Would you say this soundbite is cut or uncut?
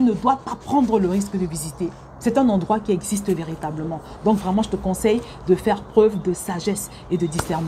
uncut